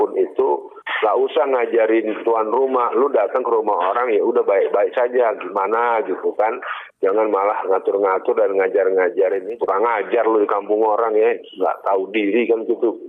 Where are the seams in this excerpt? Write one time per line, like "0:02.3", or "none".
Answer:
0:09.4